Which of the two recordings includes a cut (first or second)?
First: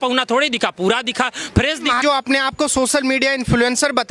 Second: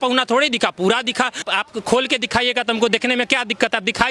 second